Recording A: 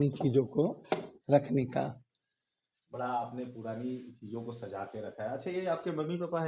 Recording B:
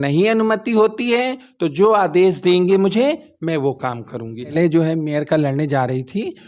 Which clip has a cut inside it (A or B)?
B